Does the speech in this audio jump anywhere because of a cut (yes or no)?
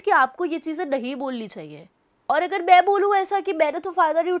no